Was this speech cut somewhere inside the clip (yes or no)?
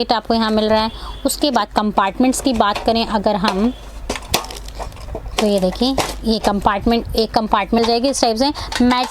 yes